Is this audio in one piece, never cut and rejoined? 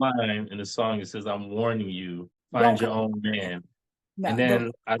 no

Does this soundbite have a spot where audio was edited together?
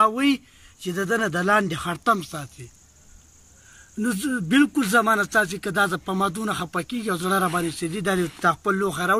no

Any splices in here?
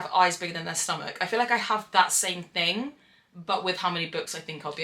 no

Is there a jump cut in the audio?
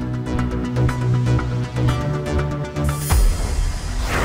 yes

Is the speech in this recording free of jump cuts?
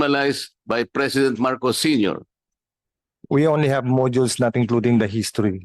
no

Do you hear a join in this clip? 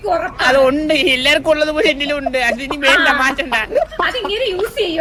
no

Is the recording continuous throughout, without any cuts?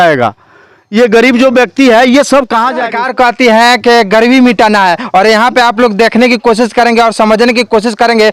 no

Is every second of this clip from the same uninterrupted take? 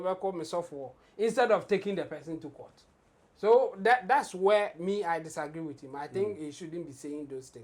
yes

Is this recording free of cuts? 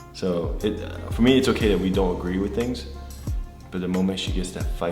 yes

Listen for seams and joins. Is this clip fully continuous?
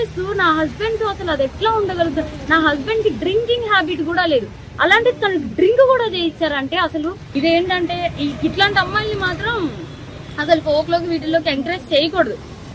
no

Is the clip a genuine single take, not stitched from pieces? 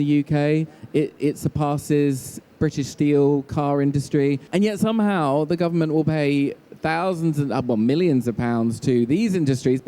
no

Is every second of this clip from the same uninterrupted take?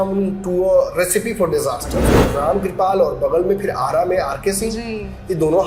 no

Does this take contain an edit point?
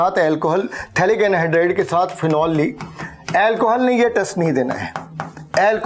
no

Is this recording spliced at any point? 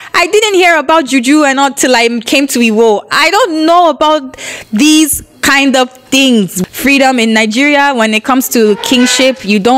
yes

